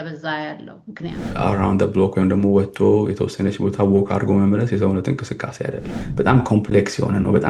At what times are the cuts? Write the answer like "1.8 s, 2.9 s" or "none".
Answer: 1.3 s, 6.0 s